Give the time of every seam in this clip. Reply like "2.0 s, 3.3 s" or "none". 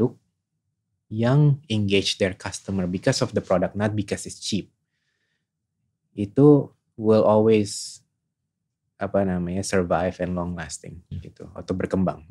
none